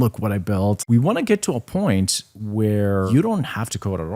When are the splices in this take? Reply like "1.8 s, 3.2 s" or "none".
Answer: 0.8 s, 3.1 s